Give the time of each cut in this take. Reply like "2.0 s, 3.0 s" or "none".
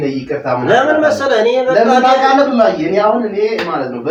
none